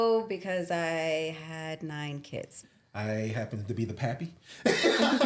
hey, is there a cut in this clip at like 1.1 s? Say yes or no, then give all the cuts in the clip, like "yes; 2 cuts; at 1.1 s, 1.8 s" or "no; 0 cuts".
no; 1 cut; at 2.6 s